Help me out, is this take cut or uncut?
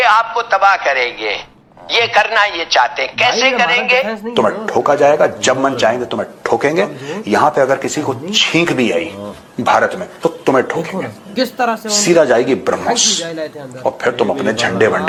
uncut